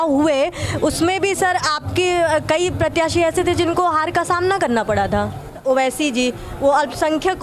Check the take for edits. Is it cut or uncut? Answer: cut